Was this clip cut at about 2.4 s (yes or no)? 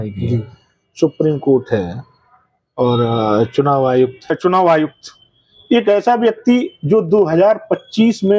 no